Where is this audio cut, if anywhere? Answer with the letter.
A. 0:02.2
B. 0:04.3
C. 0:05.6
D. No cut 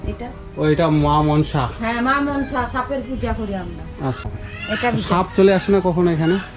B